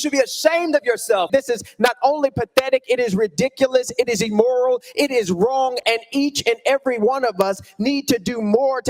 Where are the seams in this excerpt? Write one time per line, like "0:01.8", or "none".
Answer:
0:01.3